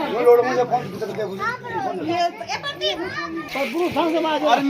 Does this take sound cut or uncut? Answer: cut